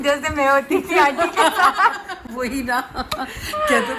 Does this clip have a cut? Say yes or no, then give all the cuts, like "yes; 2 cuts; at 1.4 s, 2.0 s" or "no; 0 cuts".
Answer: no; 0 cuts